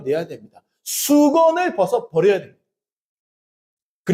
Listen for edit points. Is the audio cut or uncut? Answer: uncut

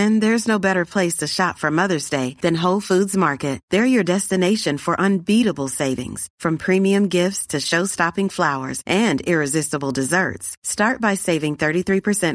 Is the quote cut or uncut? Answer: uncut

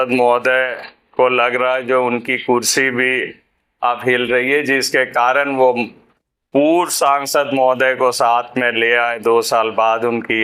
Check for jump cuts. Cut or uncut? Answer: uncut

